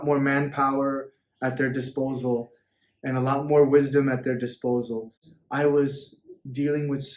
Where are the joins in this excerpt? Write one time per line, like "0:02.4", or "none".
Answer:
0:05.3